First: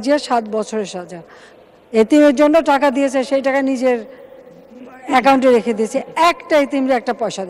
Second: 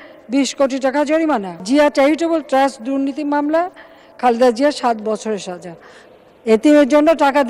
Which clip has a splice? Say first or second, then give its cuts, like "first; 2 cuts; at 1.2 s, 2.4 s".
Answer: second; 1 cut; at 1.5 s